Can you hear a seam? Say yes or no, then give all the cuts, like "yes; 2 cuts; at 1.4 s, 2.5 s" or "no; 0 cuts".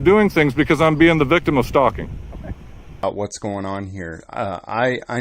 yes; 1 cut; at 2.9 s